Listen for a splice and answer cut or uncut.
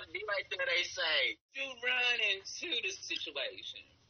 cut